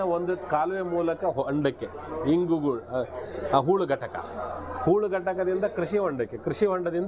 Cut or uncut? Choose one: uncut